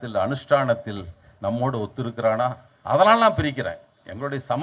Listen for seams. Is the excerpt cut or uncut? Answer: cut